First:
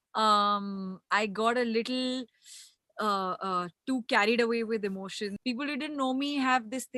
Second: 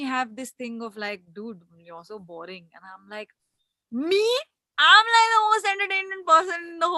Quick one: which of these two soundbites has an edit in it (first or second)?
first